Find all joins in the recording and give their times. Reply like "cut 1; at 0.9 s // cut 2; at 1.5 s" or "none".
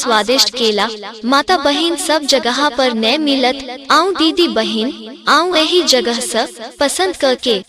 cut 1; at 3.7 s